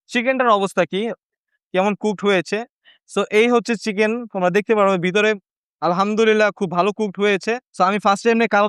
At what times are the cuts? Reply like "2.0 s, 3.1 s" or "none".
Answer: 7.6 s